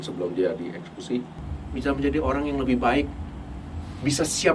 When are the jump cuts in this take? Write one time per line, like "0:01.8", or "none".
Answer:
0:01.4